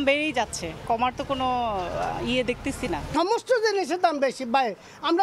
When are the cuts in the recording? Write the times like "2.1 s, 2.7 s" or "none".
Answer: none